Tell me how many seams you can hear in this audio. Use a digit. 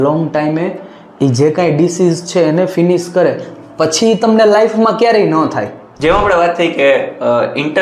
1